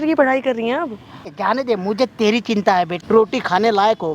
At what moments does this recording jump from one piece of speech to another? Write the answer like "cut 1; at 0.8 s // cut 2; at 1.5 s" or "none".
cut 1; at 1.4 s // cut 2; at 3.0 s